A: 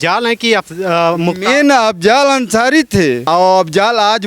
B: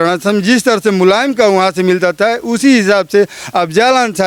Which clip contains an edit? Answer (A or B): A